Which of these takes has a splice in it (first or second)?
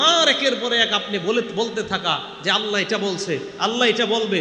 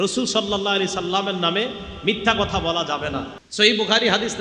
second